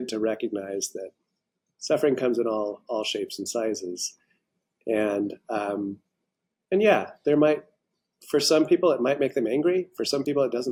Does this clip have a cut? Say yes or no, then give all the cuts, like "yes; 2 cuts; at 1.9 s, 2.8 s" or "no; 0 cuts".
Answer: no; 0 cuts